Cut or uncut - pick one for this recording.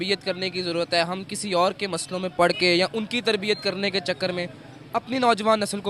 uncut